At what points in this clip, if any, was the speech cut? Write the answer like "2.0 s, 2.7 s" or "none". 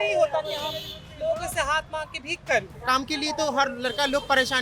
2.7 s